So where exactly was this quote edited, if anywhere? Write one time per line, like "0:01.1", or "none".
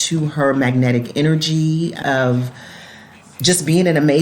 0:02.0